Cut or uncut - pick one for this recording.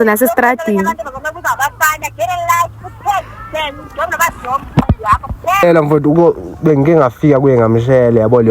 cut